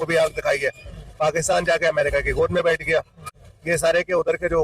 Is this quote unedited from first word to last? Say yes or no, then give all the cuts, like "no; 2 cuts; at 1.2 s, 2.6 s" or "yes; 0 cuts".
yes; 0 cuts